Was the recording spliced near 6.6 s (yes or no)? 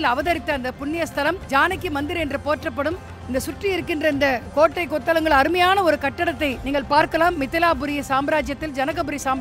yes